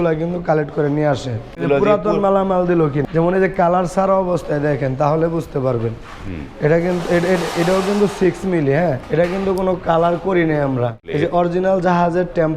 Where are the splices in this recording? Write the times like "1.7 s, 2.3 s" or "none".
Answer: 1.6 s, 3.0 s, 9.0 s, 11.0 s

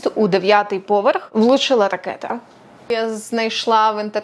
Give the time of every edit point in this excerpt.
1.3 s, 2.7 s

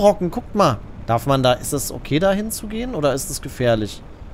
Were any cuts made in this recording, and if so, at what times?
0.9 s

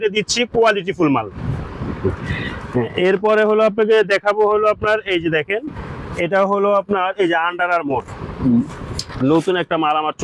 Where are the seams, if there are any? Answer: none

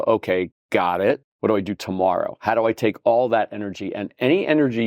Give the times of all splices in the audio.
1.3 s

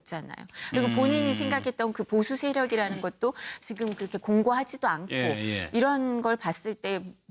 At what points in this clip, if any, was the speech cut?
3.4 s

